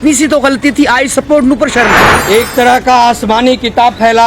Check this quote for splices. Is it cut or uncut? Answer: cut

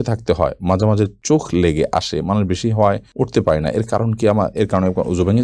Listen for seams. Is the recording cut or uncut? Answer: uncut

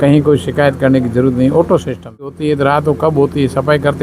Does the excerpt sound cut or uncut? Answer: cut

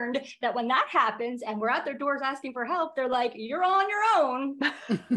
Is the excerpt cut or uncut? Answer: uncut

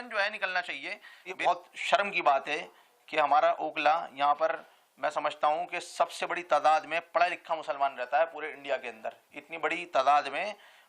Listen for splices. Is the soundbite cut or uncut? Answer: cut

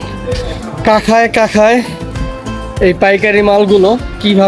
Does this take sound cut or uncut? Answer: uncut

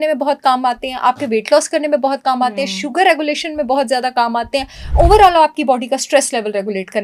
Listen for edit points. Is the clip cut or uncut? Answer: uncut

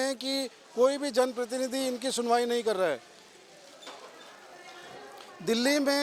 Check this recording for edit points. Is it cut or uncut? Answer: uncut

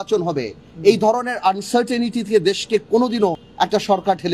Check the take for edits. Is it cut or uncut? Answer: cut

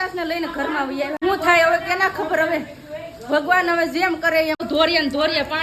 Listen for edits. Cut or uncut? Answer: cut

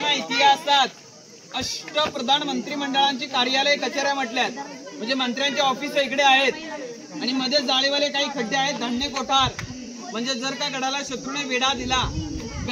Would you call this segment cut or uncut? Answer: uncut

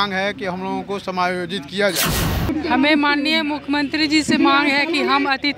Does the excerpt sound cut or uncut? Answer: cut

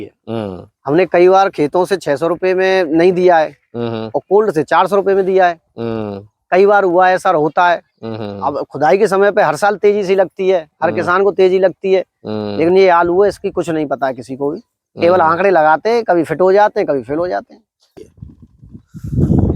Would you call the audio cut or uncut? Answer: cut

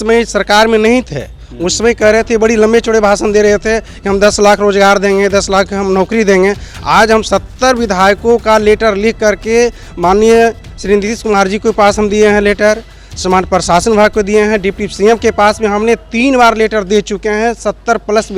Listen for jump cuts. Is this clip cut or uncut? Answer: uncut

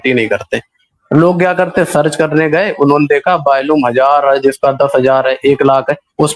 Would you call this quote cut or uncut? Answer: uncut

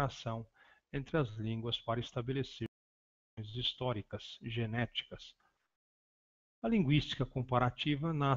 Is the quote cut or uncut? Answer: uncut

